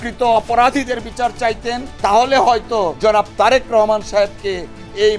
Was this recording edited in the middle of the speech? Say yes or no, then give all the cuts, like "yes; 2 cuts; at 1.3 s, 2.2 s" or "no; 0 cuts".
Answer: yes; 2 cuts; at 2.1 s, 3.0 s